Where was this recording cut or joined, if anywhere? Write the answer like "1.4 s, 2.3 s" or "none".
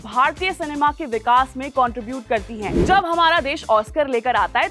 2.7 s